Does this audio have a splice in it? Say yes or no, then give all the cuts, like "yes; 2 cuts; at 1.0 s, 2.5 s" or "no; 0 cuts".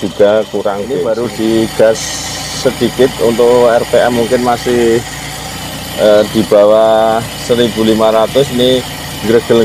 yes; 1 cut; at 0.9 s